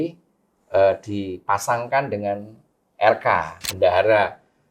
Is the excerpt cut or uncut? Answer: cut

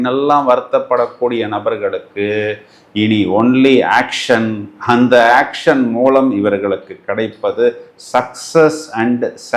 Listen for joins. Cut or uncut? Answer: uncut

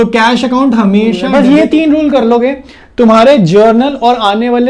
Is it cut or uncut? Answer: cut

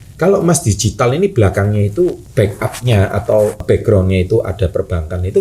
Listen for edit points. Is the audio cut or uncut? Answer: cut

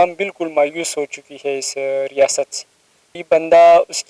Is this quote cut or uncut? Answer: cut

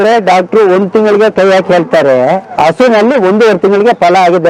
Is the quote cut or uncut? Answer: uncut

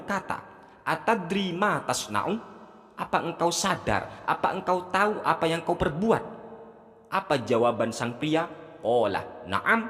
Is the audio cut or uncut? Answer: uncut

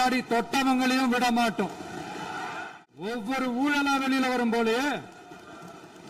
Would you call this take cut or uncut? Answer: cut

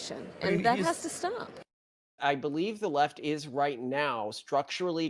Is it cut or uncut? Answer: cut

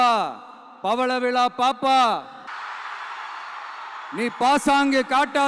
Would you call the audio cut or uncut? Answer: cut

